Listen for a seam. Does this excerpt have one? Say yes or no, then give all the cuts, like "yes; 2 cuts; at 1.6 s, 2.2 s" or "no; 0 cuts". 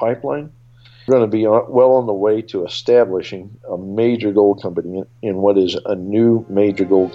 yes; 1 cut; at 1.1 s